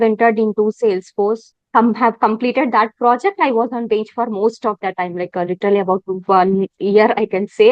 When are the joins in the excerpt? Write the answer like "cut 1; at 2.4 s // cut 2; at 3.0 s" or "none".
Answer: cut 1; at 1.5 s